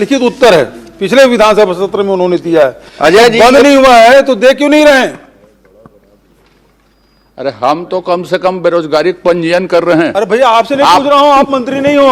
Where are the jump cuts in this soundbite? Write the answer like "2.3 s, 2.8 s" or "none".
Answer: none